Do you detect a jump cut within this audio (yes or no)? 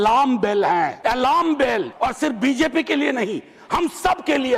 yes